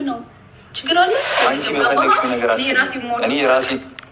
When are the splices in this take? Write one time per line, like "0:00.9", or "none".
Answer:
0:01.4